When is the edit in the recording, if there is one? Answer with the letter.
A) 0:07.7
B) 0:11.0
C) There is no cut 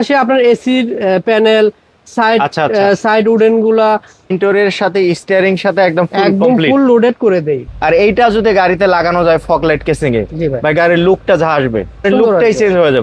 A